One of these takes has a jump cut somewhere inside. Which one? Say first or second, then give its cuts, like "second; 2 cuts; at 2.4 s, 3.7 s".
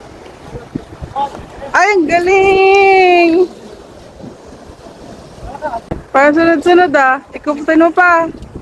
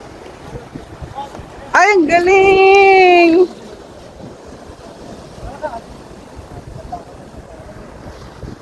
first; 1 cut; at 5.9 s